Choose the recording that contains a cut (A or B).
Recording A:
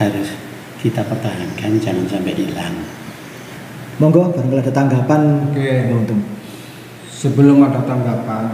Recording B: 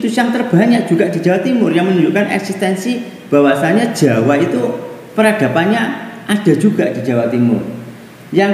A